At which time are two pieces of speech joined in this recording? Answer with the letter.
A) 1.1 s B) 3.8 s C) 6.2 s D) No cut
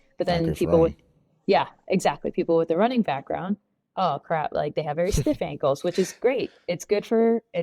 D